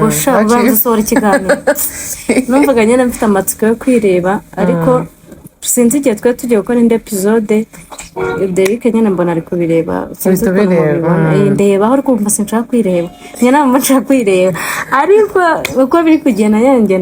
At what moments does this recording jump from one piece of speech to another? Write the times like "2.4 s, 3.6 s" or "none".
none